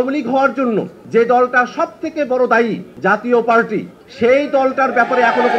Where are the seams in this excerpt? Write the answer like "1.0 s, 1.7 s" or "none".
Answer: 1.0 s, 2.9 s, 4.0 s